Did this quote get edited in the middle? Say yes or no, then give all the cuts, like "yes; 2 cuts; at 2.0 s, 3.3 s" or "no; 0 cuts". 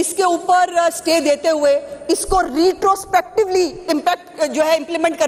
no; 0 cuts